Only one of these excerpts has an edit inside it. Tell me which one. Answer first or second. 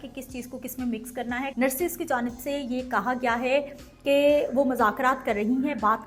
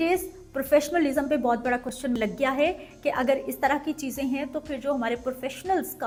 first